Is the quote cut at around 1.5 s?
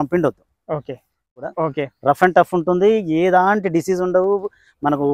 yes; 1 cut; at 1.5 s

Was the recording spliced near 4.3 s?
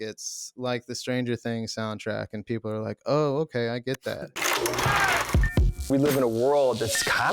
yes; 1 cut; at 4.3 s

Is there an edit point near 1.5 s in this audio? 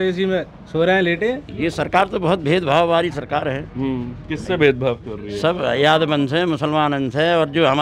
yes; 1 cut; at 1.5 s

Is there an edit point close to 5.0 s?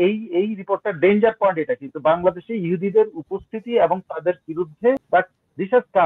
yes; 1 cut; at 5.0 s

